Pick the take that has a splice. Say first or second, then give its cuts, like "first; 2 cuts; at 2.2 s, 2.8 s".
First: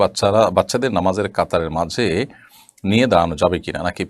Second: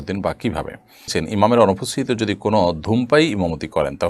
second; 1 cut; at 1.1 s